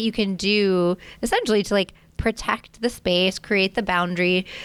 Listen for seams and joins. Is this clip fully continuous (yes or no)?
yes